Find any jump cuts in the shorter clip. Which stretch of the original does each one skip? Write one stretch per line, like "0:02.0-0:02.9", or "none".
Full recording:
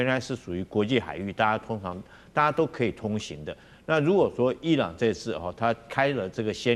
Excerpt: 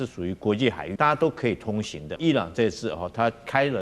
0:01.1-0:02.2
0:03.5-0:04.6